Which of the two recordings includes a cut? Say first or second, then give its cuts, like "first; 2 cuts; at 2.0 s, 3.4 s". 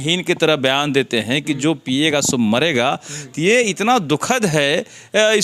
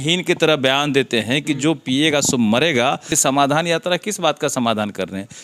second; 1 cut; at 3.1 s